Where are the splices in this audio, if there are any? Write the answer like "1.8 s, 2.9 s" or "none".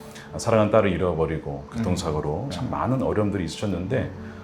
2.5 s